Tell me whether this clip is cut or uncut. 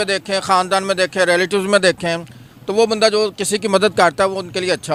uncut